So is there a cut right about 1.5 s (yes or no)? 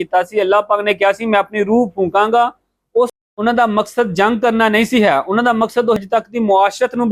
no